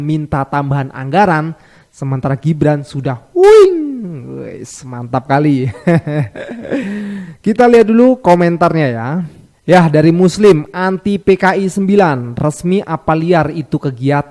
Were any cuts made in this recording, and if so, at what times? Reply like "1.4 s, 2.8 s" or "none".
none

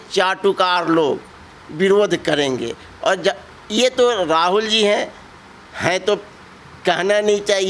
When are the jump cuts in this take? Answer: none

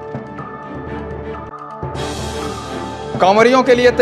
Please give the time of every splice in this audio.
3.1 s

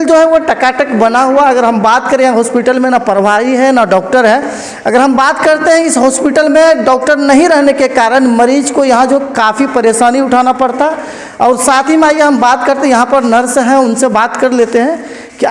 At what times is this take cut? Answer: none

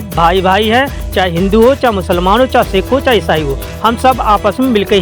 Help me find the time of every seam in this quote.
none

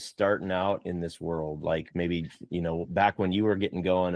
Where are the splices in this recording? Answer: none

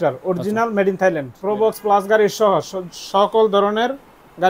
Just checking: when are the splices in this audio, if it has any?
1.4 s

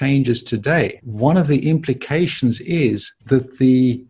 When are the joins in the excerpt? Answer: 1.0 s, 3.1 s

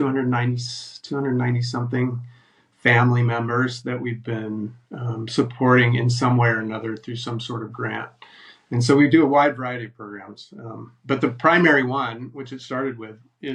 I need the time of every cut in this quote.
none

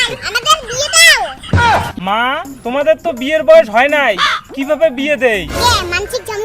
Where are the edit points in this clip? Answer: 1.9 s

